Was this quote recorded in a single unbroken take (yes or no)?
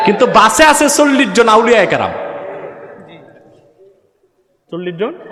yes